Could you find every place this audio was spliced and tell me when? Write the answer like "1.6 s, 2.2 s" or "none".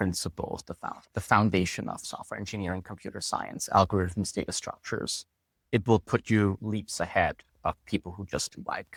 none